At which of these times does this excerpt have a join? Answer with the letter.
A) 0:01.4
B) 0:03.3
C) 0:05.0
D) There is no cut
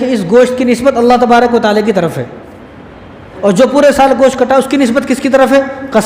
B